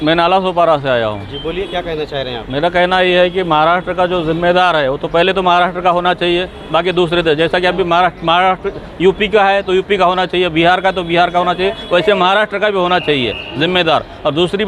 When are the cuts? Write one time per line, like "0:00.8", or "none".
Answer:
none